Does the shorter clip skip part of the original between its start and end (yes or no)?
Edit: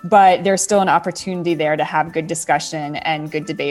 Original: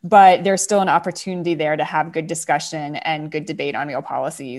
no